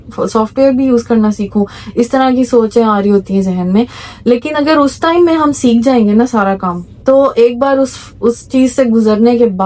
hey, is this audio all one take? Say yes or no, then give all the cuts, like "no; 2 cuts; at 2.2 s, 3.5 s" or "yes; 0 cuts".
yes; 0 cuts